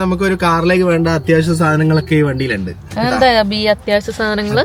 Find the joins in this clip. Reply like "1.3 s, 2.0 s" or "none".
none